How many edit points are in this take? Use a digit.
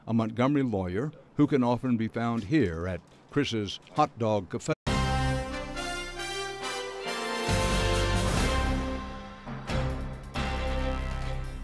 0